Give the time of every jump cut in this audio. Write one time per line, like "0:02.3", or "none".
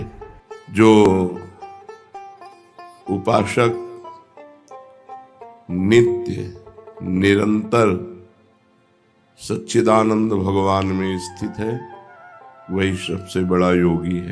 0:01.6
0:03.1

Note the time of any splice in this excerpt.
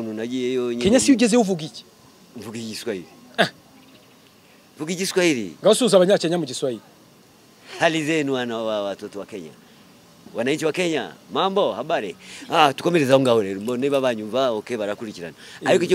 none

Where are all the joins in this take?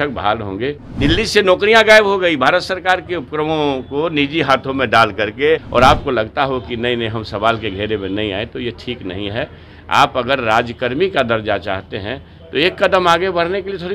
0:00.9
0:05.7

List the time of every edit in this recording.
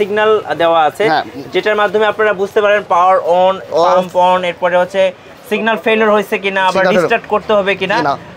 none

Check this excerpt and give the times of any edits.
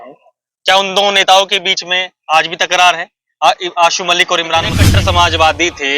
0:04.8

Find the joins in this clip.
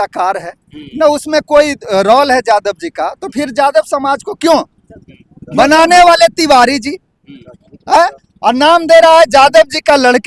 none

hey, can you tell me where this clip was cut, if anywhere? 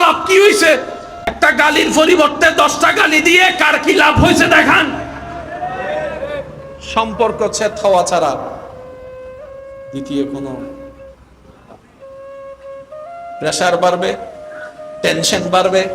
0:01.3
0:08.7
0:09.9

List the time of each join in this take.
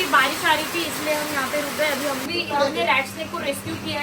0:02.2

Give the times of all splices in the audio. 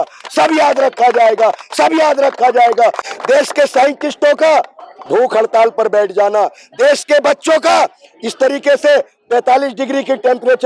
none

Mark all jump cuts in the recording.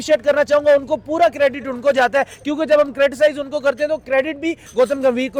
none

